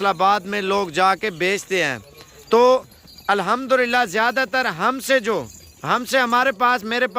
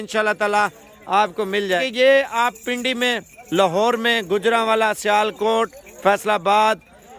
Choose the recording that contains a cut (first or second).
second